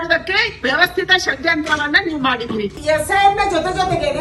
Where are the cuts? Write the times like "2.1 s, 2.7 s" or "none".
2.8 s

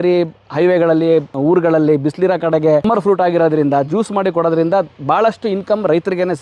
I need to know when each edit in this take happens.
1.3 s, 2.8 s

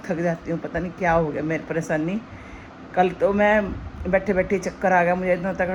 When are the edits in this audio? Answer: none

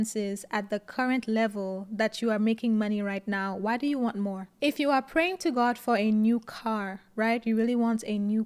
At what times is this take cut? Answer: none

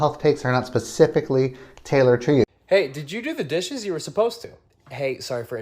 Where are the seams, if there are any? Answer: 2.5 s

